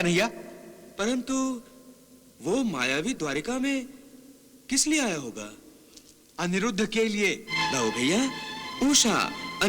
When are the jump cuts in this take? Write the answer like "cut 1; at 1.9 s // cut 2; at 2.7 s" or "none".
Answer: cut 1; at 7.5 s